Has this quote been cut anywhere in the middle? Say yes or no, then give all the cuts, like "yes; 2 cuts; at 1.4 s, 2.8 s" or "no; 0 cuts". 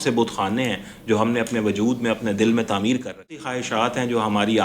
yes; 1 cut; at 3.6 s